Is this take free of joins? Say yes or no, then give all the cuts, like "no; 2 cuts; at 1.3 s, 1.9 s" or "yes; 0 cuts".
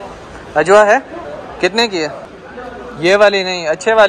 yes; 0 cuts